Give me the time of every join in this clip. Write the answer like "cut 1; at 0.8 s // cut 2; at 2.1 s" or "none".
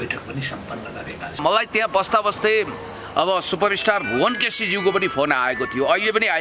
cut 1; at 1.4 s